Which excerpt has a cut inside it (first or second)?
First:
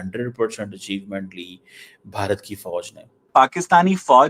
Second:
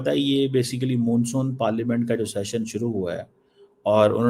first